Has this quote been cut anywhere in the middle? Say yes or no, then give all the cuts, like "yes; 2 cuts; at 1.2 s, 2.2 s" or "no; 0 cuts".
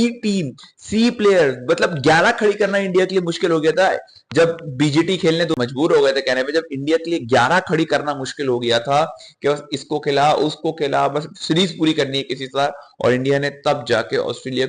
yes; 1 cut; at 5.5 s